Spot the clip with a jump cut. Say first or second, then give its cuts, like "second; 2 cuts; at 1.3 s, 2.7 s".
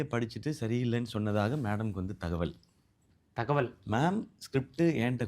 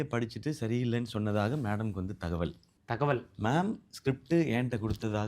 second; 1 cut; at 2.7 s